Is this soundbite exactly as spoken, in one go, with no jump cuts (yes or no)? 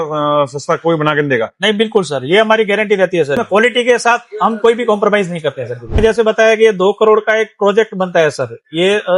no